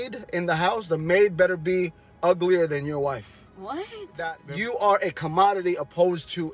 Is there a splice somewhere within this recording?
yes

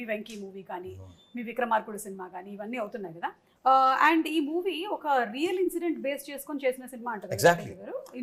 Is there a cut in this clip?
yes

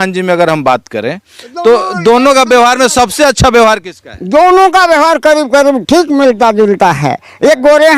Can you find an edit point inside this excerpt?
no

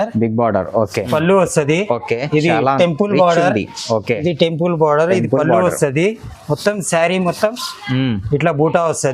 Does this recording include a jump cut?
yes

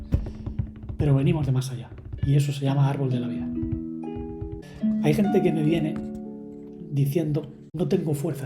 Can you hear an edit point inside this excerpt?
yes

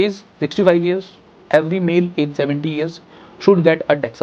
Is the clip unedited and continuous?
yes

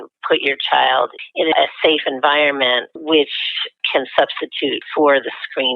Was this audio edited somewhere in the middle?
yes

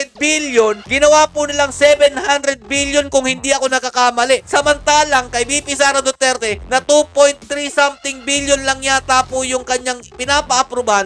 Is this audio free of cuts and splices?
yes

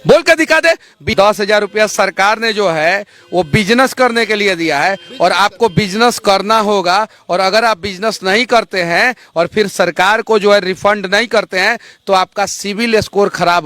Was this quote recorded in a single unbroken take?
no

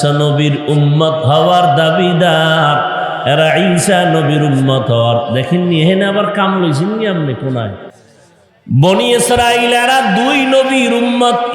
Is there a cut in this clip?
yes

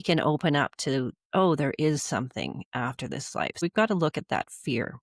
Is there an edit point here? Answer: yes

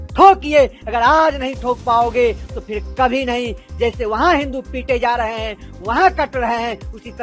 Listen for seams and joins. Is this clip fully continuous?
yes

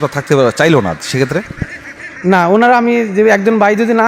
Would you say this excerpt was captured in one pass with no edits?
yes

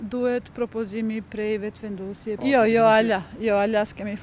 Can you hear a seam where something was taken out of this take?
yes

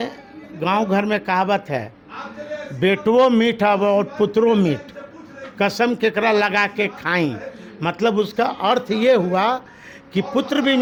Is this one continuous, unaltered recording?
yes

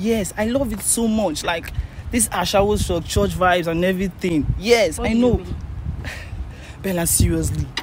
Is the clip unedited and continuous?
yes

